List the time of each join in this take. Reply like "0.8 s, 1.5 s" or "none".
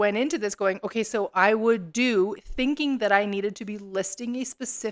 none